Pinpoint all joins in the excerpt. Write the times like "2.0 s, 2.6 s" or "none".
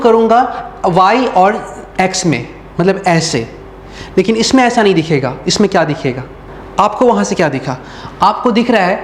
6.3 s